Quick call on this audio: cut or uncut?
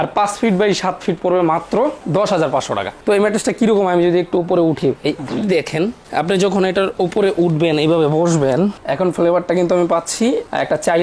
uncut